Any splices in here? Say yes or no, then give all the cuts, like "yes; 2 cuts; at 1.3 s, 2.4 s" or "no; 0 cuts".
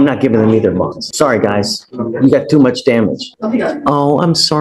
yes; 2 cuts; at 1.0 s, 3.3 s